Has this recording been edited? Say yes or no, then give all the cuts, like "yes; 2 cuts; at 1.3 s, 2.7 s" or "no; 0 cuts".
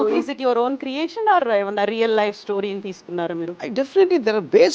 yes; 1 cut; at 3.7 s